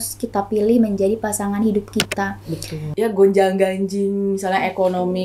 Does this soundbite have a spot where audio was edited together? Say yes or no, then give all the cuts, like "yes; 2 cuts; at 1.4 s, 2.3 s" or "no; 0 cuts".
yes; 1 cut; at 2.8 s